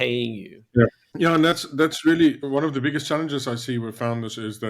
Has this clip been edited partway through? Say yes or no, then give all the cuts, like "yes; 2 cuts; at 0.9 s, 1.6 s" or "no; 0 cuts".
yes; 2 cuts; at 1.0 s, 2.4 s